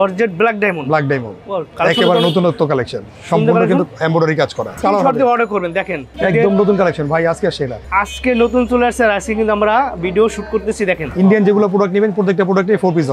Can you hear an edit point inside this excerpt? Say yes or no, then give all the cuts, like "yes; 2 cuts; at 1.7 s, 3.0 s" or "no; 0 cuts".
yes; 4 cuts; at 4.8 s, 6.0 s, 7.8 s, 11.1 s